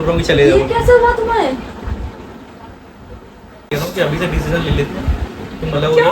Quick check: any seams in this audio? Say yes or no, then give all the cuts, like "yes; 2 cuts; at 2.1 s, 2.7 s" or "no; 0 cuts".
yes; 1 cut; at 3.7 s